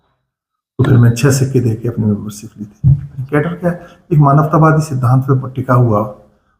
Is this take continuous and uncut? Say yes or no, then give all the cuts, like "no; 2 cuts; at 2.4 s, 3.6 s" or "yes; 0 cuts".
no; 1 cut; at 3.1 s